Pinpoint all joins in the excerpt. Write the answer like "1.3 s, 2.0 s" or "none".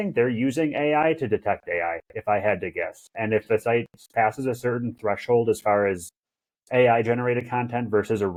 none